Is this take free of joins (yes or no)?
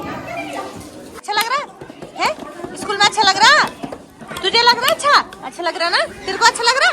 no